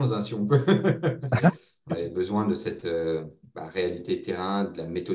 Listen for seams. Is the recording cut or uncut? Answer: cut